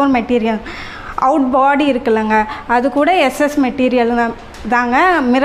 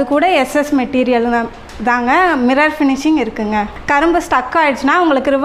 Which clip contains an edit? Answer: second; 1 cut; at 3.7 s

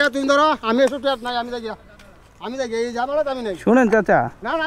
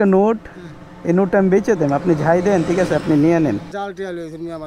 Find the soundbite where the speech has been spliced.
second; 1 cut; at 3.7 s

